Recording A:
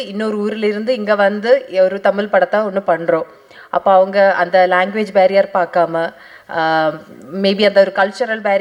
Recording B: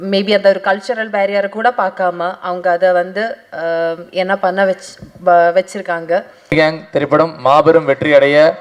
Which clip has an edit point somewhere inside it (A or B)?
B